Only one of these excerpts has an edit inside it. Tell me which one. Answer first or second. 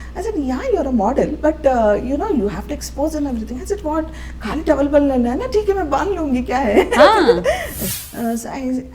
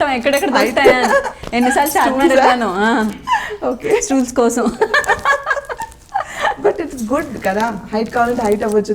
first